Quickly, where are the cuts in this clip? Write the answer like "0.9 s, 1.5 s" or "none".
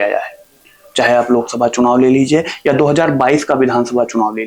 none